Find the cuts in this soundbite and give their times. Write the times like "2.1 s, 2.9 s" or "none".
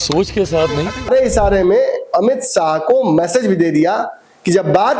1.1 s